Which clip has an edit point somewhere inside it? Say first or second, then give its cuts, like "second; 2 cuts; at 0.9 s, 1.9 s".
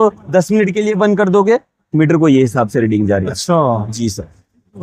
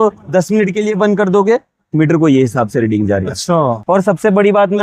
second; 1 cut; at 3.8 s